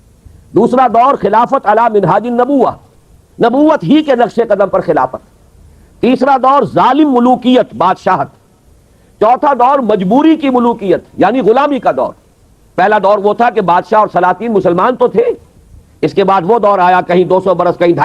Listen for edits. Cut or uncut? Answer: uncut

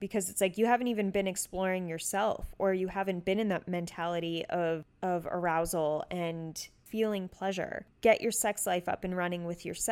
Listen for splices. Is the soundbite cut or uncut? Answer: cut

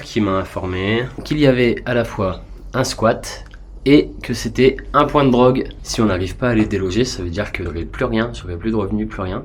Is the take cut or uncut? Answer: cut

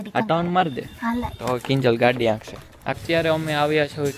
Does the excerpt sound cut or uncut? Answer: cut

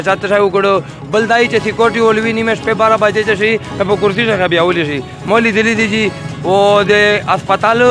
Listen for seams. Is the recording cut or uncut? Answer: uncut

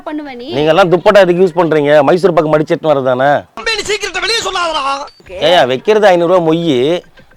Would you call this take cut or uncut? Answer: cut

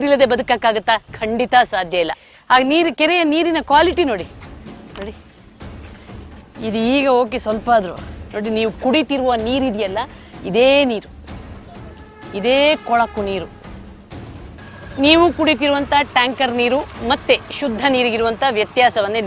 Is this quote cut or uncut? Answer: cut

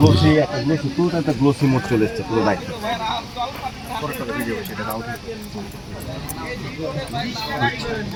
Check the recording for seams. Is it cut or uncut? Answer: uncut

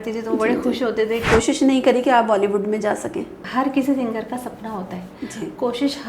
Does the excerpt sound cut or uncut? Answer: cut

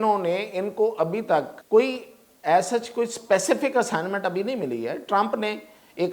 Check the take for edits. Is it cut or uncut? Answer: cut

